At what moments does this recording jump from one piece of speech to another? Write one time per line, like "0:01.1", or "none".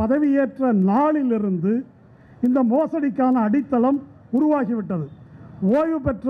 none